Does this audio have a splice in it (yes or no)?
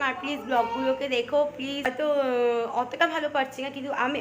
yes